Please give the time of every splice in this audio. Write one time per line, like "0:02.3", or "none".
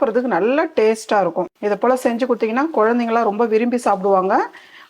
0:01.5